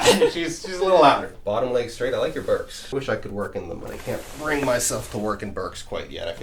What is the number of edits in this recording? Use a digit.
2